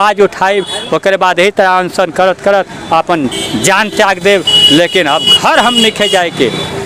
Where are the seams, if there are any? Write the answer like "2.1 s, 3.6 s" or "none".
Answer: none